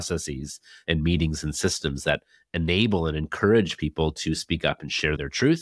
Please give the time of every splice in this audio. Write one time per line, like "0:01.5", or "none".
none